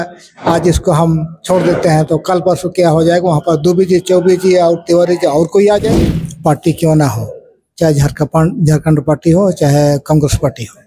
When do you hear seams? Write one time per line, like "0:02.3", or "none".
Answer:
0:06.0